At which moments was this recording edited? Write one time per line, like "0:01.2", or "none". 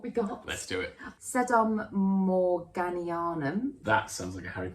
0:01.0
0:03.8